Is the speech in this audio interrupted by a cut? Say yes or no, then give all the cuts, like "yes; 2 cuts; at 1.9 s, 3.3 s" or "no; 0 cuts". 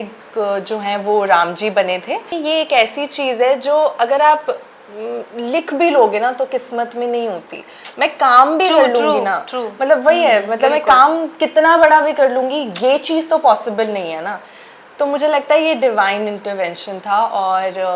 yes; 1 cut; at 2.3 s